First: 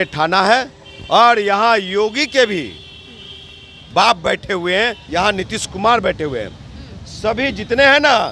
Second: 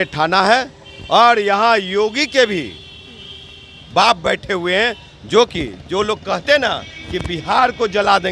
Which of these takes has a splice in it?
first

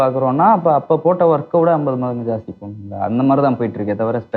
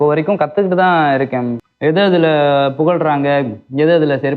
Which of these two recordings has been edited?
second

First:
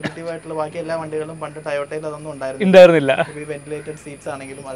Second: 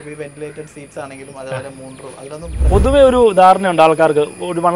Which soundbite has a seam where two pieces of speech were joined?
second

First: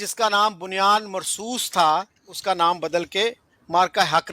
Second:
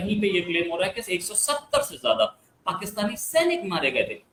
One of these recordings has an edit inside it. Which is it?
first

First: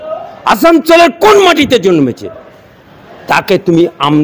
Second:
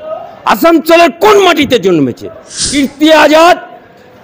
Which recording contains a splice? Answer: second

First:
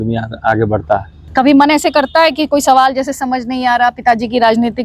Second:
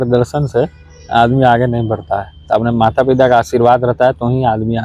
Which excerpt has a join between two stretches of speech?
first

